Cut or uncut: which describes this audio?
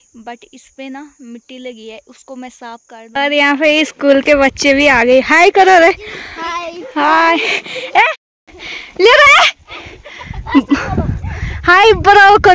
cut